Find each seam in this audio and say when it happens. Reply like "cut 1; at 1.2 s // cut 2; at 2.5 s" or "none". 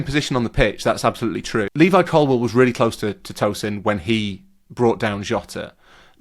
cut 1; at 1.7 s